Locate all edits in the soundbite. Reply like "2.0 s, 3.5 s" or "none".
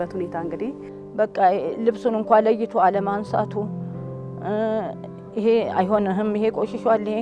0.9 s